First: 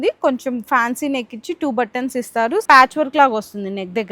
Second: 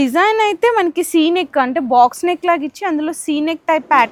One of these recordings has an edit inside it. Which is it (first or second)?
first